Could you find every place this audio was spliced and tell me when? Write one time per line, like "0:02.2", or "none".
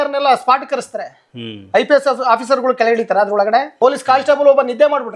0:03.7